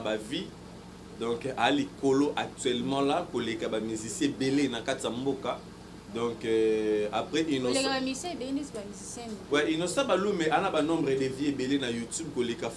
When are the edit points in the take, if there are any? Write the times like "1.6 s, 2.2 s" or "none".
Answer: none